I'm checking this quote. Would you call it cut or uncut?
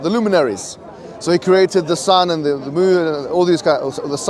uncut